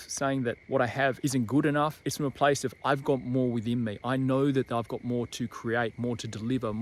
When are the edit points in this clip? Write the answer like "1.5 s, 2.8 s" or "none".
0.8 s, 2.0 s

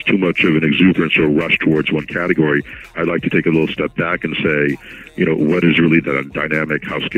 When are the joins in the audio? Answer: none

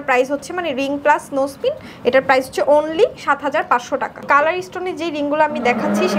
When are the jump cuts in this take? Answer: 4.2 s

